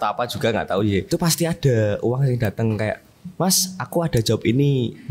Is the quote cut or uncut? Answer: cut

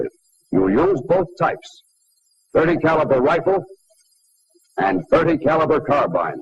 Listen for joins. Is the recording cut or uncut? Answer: cut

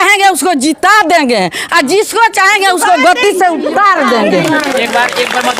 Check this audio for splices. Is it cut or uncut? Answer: uncut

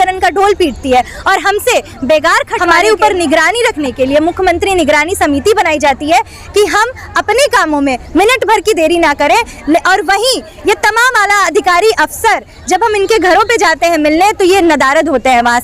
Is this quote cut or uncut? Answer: cut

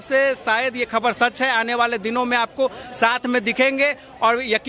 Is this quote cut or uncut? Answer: uncut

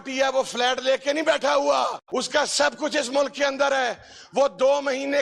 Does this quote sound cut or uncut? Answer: cut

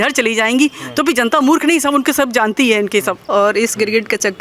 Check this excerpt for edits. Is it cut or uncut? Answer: cut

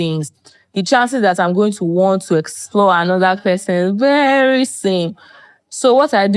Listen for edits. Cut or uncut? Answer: uncut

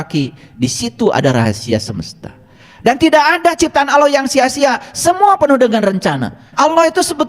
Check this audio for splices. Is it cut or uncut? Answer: cut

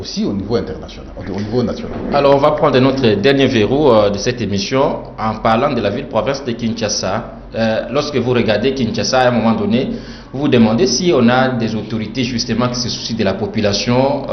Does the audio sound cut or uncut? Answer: uncut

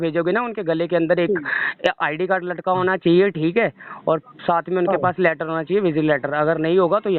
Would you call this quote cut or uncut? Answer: uncut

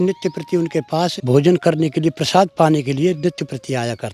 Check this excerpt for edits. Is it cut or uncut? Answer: cut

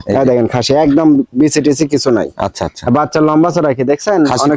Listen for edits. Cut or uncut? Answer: uncut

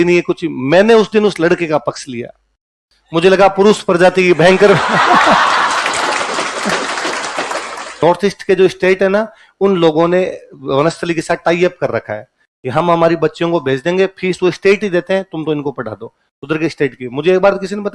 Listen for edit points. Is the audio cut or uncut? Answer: cut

